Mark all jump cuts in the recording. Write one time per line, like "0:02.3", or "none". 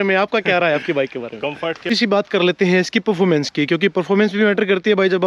0:01.9